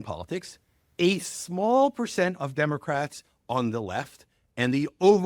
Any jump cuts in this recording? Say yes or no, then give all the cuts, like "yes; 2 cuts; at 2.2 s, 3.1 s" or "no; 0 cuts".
no; 0 cuts